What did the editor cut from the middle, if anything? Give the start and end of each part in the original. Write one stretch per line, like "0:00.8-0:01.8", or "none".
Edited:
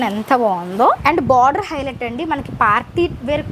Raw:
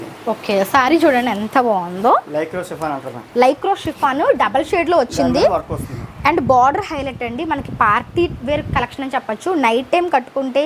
0:02.2-0:06.2